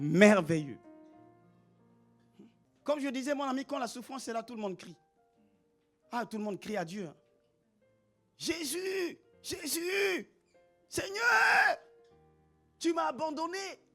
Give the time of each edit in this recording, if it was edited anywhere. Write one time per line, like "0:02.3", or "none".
0:02.7